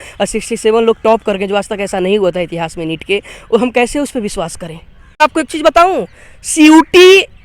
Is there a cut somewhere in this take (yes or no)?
yes